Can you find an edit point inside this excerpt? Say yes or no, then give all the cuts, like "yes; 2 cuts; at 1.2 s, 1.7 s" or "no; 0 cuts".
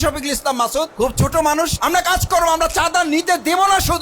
yes; 2 cuts; at 0.9 s, 1.7 s